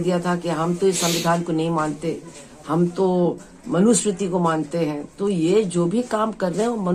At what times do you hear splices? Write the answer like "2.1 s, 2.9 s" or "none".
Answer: none